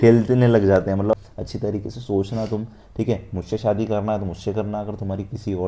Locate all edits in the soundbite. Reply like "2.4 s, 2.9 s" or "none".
1.1 s